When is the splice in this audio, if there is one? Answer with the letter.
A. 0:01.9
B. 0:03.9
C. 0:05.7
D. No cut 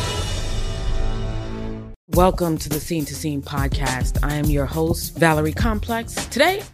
D